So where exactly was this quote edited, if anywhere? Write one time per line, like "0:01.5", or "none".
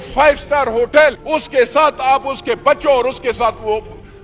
0:01.2

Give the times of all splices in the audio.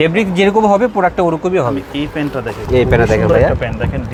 none

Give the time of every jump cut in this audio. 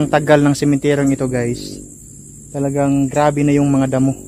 none

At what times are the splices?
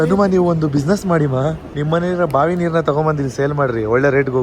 0:01.7

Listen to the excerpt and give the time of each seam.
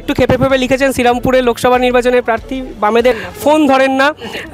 0:03.2

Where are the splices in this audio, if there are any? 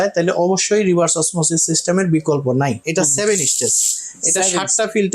0:02.8

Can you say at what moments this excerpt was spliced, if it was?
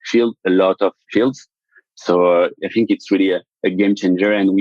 0:01.5
0:02.5

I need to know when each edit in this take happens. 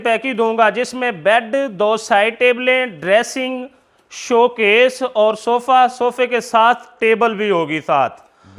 none

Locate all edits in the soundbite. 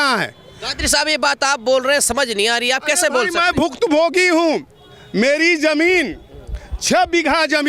none

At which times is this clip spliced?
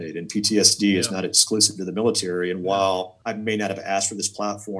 0:03.1

